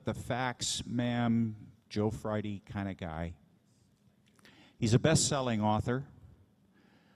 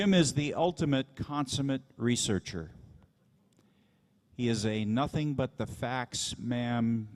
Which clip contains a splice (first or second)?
first